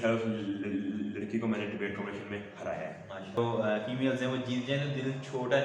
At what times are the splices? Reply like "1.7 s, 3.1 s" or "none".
3.4 s